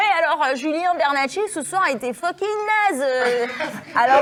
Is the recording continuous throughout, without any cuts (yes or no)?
yes